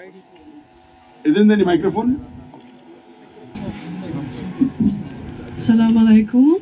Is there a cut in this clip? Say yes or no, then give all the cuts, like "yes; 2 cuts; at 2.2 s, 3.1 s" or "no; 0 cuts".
yes; 1 cut; at 3.5 s